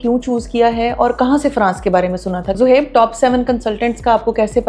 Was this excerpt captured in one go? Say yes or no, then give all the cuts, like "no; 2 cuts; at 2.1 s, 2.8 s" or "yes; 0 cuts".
no; 1 cut; at 2.5 s